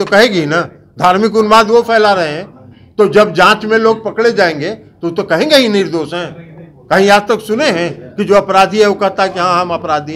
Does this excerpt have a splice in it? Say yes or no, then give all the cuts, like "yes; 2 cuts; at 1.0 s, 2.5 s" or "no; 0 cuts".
no; 0 cuts